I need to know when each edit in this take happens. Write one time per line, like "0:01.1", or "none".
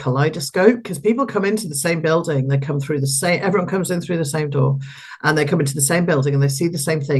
none